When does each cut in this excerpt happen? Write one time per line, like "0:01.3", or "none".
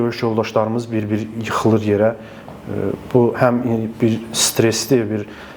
none